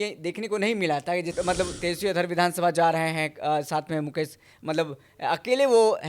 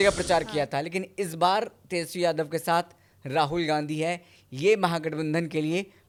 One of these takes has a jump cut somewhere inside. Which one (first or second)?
first